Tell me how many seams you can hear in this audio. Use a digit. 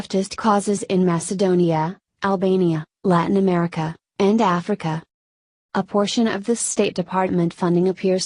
1